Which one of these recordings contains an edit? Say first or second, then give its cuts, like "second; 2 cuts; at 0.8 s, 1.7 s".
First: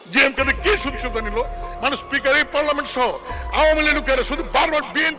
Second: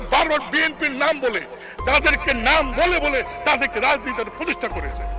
first; 1 cut; at 1.6 s